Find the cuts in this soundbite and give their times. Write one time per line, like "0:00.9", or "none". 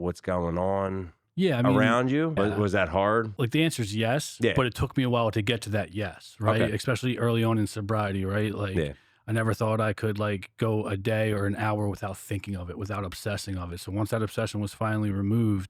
0:02.4
0:03.3